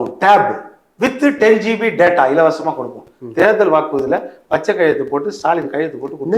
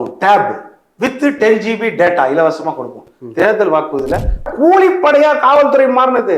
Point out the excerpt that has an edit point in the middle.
second; 1 cut; at 4.5 s

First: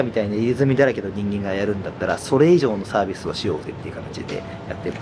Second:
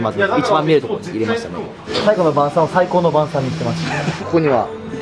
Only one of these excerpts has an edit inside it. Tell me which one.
second; 2 cuts; at 1.9 s, 4.1 s

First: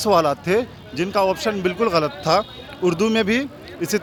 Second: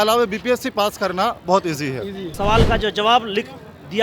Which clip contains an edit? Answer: second; 1 cut; at 2.3 s

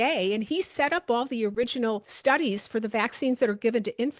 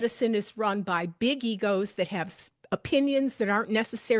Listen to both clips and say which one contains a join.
first; 1 cut; at 2.1 s

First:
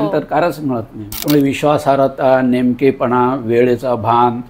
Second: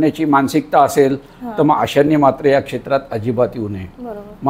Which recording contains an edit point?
first; 1 cut; at 1.0 s

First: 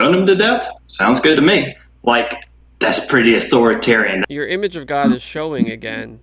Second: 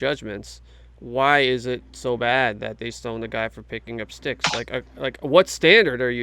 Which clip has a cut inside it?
first; 1 cut; at 4.2 s

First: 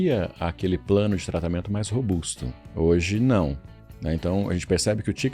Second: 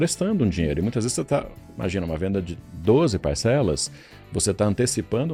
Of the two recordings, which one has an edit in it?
first; 1 cut; at 2.6 s

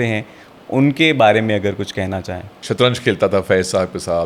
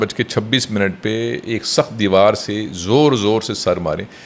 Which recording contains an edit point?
first; 1 cut; at 2.5 s

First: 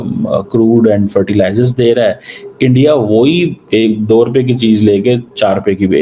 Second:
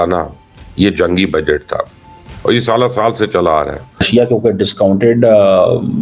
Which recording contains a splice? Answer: second; 1 cut; at 4.1 s

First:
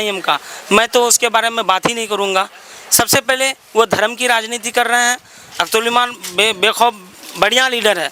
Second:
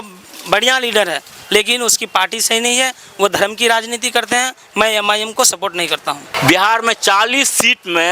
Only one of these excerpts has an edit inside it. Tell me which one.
second; 1 cut; at 6.3 s

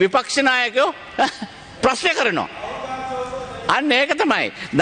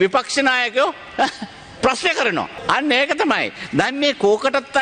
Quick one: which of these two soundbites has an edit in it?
second; 1 cut; at 2.6 s

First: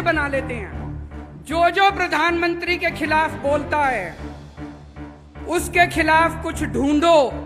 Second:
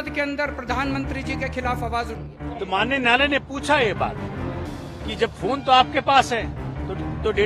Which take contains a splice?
second; 1 cut; at 2.4 s

